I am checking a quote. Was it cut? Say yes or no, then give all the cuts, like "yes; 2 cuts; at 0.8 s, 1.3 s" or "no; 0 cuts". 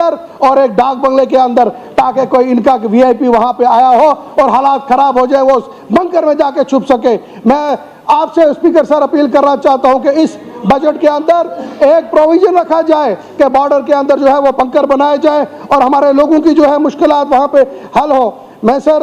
no; 0 cuts